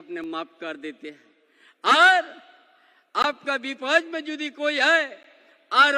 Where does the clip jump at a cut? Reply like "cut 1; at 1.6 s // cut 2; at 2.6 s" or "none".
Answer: none